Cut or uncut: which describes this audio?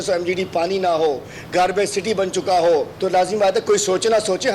cut